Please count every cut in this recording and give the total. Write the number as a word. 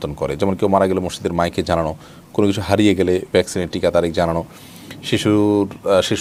zero